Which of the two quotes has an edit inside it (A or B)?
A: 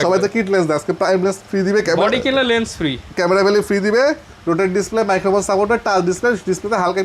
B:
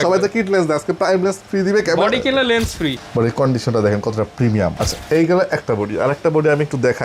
B